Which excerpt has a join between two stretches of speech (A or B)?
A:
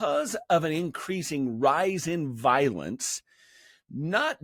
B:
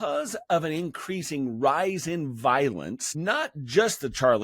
B